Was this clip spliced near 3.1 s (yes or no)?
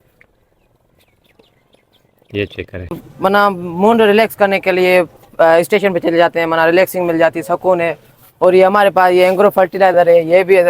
yes